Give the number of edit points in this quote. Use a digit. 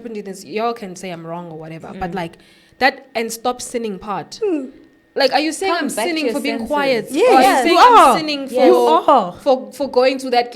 0